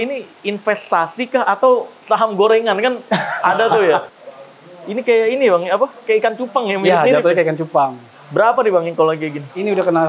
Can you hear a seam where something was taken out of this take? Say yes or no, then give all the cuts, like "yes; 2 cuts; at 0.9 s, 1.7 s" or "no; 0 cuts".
yes; 1 cut; at 4.1 s